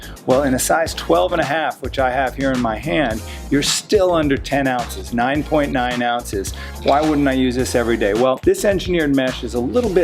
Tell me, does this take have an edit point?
yes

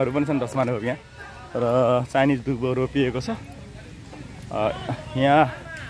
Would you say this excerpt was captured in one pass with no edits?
yes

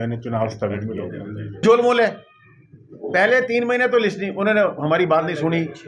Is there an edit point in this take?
yes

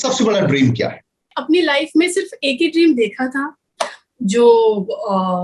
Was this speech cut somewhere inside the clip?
yes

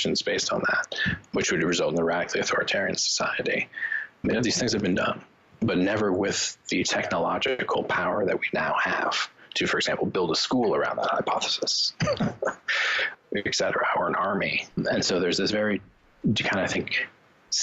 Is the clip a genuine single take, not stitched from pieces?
no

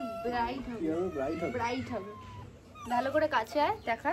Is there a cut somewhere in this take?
no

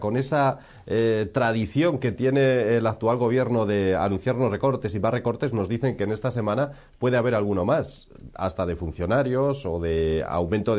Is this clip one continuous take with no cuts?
yes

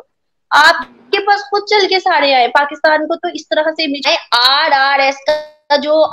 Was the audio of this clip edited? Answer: yes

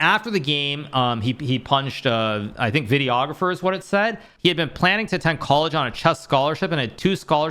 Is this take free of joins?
no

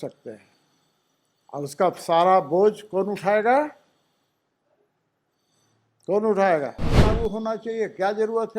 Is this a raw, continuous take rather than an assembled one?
no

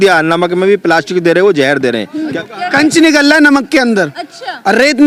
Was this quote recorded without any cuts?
yes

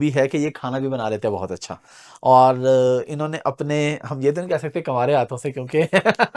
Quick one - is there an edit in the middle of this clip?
no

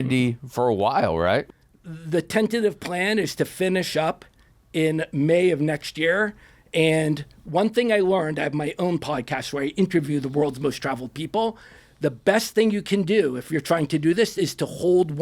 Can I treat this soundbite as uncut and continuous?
no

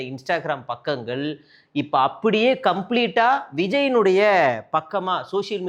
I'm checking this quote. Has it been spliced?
no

